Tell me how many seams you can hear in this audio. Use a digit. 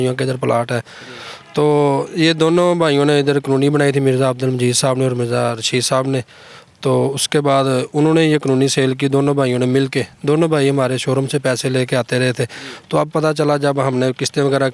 0